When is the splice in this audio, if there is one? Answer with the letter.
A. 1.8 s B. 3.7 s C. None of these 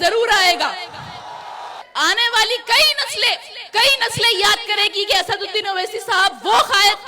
A